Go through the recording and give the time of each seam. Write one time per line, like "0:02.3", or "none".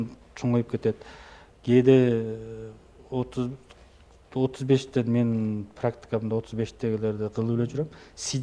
none